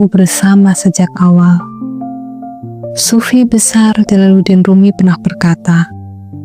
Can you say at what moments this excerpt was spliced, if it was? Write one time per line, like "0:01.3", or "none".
none